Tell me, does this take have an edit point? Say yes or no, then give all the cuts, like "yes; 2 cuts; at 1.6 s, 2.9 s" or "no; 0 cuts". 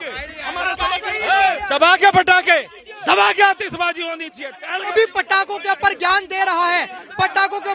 yes; 1 cut; at 4.9 s